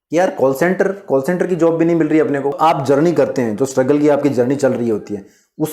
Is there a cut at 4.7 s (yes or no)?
no